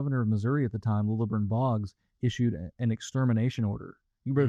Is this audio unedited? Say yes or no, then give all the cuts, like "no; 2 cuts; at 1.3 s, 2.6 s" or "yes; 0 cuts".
yes; 0 cuts